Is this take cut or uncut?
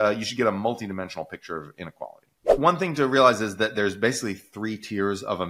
cut